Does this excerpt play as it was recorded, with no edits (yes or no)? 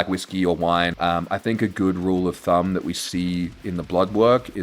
no